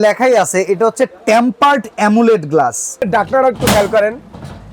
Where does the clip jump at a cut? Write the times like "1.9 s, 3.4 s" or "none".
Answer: 3.1 s

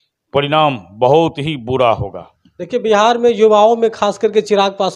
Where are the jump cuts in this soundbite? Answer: none

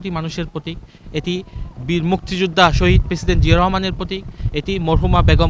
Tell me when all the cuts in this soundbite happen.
none

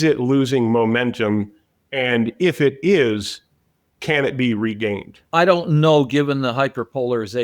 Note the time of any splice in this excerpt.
5.1 s

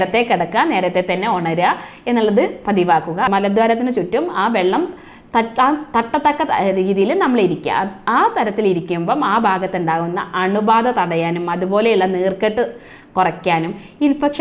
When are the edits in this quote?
3.3 s

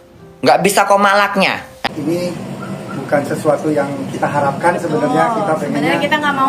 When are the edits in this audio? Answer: 1.9 s

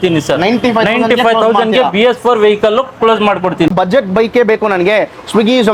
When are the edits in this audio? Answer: 3.7 s

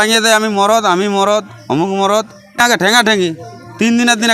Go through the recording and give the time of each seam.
2.4 s

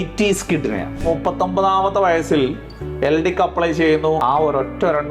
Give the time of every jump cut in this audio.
1.0 s, 4.2 s

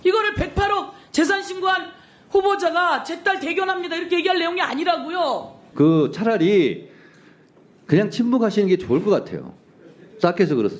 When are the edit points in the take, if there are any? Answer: 5.6 s

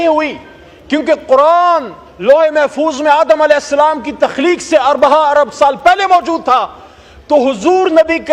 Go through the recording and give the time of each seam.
none

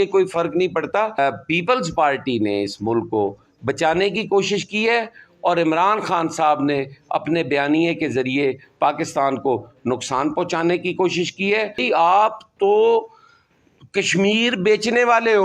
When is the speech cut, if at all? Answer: 1.2 s, 11.8 s

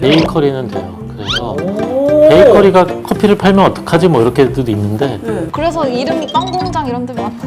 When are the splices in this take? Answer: 5.5 s

